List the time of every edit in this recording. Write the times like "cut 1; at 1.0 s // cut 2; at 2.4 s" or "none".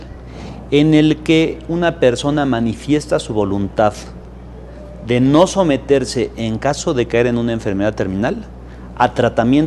none